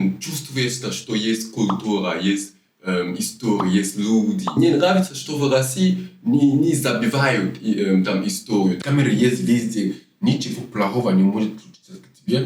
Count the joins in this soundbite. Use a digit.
2